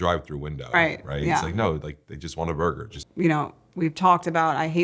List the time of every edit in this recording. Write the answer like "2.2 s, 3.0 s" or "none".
2.9 s